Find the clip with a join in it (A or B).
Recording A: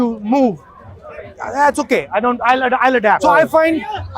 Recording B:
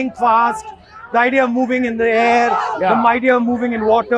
A